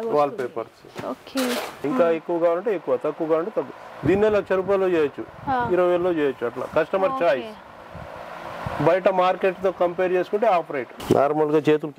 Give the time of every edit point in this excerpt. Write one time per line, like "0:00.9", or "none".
0:01.8
0:10.9